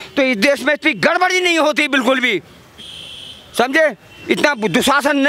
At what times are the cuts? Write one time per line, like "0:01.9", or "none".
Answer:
none